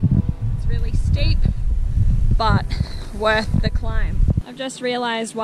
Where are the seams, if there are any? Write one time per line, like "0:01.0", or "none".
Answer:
0:04.5